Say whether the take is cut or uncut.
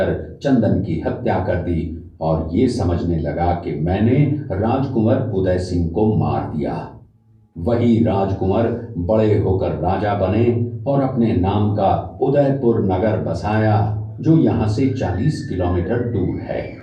uncut